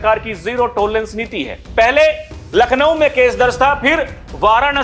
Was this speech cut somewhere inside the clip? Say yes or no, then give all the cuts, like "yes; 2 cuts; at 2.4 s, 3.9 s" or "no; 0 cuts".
yes; 1 cut; at 1.5 s